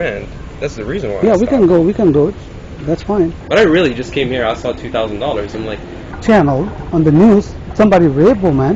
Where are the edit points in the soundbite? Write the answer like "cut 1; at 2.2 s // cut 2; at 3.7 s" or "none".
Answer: cut 1; at 3.4 s // cut 2; at 6.1 s